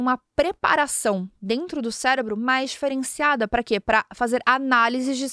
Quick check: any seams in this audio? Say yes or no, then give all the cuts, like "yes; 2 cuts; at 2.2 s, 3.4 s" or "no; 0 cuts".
no; 0 cuts